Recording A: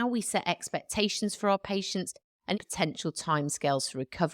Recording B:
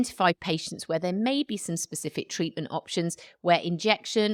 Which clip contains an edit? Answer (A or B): A